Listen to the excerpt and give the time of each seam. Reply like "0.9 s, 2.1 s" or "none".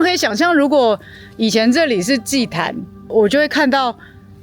3.0 s